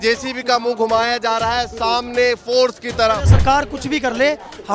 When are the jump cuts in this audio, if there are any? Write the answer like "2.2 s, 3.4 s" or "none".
3.3 s